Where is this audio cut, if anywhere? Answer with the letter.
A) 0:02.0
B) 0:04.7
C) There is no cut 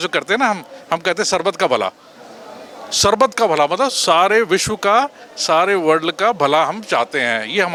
C